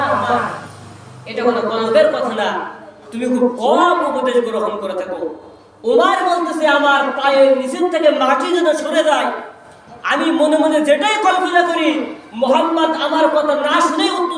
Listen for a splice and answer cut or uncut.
uncut